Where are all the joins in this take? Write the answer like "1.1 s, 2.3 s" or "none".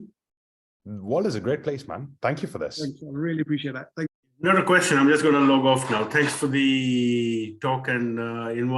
4.0 s